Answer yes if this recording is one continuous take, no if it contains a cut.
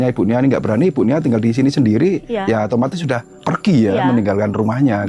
no